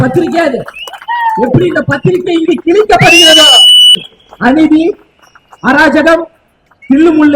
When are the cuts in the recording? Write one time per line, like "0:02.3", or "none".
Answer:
0:04.0

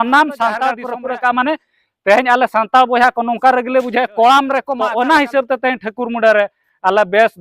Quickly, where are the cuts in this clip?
0:00.9
0:04.7

